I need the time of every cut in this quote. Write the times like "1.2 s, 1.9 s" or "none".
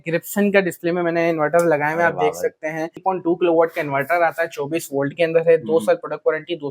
3.0 s

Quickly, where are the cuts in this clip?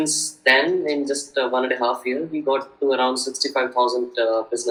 none

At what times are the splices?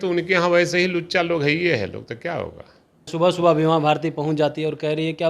3.1 s

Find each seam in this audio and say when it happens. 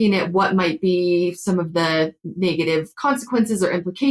none

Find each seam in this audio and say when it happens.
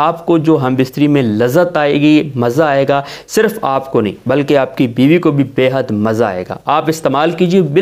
none

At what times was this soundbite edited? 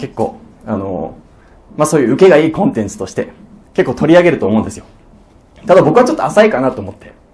none

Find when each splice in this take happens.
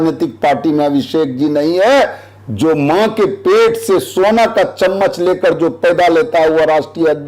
none

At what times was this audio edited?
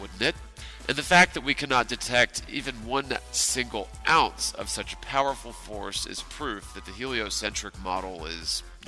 7.2 s

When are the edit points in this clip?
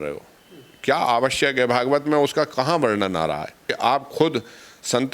none

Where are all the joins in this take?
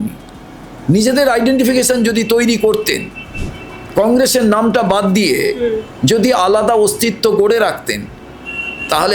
none

